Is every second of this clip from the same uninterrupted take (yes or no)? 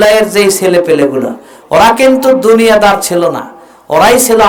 yes